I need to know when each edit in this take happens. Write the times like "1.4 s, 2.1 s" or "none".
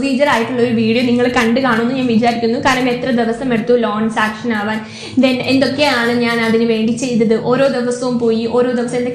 none